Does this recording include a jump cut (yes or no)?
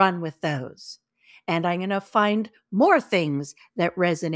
no